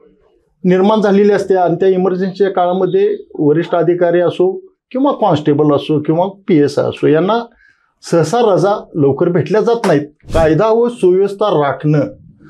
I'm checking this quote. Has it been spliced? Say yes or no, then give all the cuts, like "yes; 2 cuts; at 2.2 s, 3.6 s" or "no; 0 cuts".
yes; 1 cut; at 10.2 s